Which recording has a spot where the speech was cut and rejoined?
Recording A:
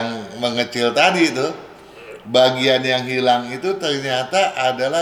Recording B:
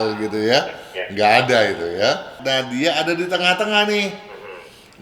B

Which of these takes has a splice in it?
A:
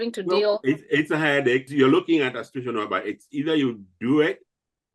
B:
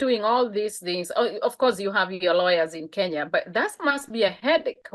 A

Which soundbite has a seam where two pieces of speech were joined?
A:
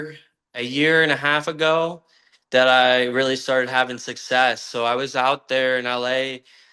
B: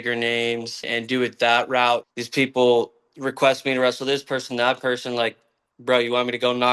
B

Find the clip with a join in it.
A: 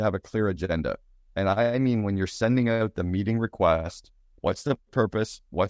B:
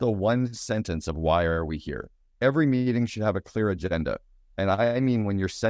B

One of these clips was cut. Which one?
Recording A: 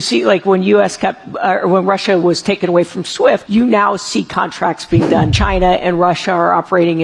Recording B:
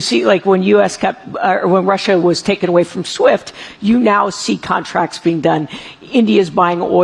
A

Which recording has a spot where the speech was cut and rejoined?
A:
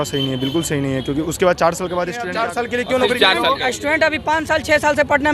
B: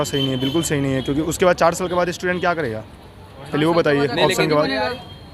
A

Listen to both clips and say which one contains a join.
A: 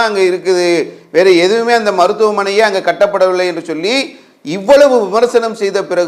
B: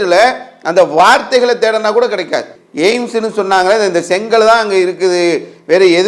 B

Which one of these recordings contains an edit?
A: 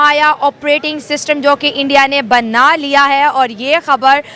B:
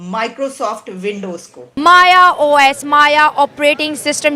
B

